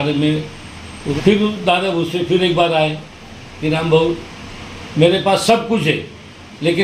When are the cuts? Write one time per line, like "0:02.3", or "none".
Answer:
0:01.1